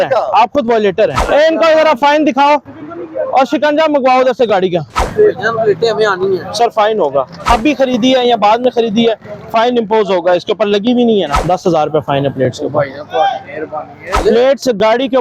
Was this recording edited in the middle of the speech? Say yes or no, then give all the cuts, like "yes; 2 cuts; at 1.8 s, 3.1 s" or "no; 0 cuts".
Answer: yes; 5 cuts; at 1.2 s, 5.0 s, 7.5 s, 11.4 s, 14.2 s